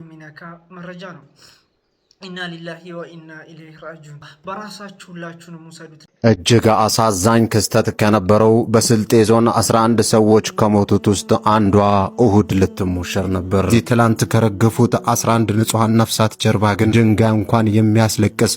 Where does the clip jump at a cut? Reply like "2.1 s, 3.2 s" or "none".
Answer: 4.3 s, 6.0 s